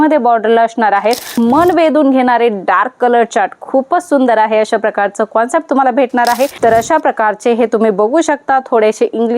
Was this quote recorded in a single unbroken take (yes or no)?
no